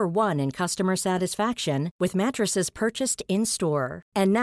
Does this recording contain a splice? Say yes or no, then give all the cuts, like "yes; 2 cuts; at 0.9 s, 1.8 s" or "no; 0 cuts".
no; 0 cuts